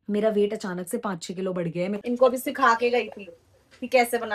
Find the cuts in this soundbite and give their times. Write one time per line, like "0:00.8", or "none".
0:02.0

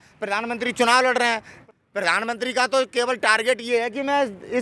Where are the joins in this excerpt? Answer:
0:01.5

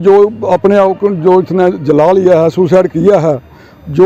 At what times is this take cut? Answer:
none

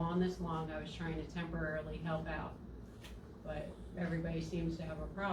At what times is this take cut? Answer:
none

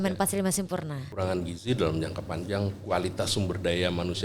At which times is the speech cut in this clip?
0:01.1

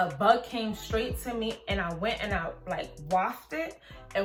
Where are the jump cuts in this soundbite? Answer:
none

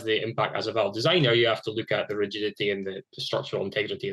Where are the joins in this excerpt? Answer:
none

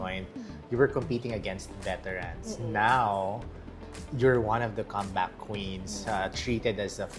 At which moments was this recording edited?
none

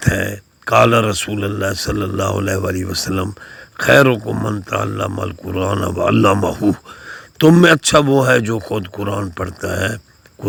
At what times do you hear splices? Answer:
none

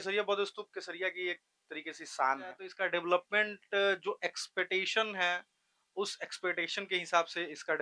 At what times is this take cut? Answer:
0:02.7

